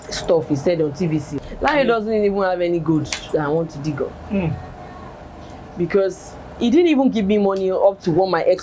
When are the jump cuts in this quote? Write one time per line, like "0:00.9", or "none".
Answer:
0:01.3

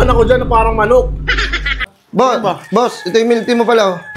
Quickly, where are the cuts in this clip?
0:01.8

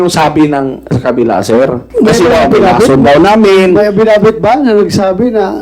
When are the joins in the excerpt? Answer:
0:01.8

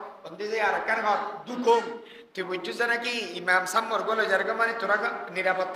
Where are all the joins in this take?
0:02.1

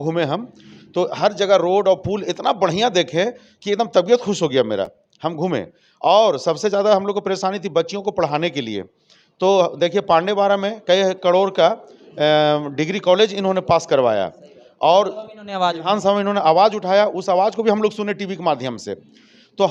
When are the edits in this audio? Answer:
none

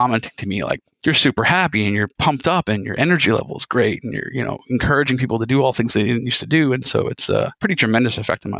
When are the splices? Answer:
0:07.5

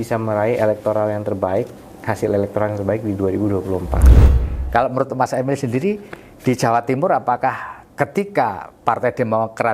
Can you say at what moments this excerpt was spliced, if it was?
0:04.1

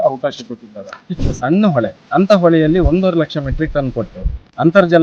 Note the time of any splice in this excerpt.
0:01.1
0:02.0

